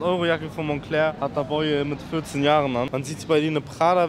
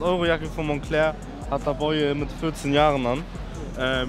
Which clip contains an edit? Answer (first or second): first